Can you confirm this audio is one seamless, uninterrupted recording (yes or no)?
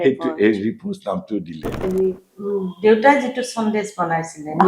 no